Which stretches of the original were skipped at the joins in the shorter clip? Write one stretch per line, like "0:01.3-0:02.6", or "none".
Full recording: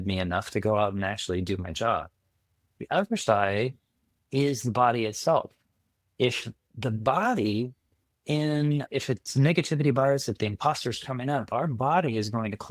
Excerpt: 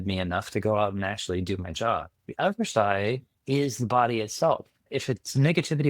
0:02.2-0:02.7
0:03.8-0:04.2
0:05.7-0:08.9